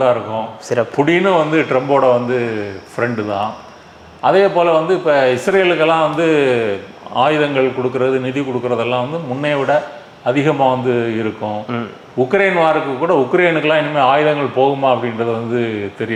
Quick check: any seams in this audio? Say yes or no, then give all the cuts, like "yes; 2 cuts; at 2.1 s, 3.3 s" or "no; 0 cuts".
no; 0 cuts